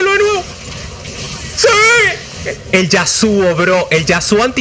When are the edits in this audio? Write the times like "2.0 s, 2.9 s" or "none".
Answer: 2.5 s